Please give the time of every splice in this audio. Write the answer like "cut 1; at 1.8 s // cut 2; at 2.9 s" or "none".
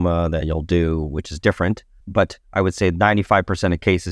cut 1; at 1.9 s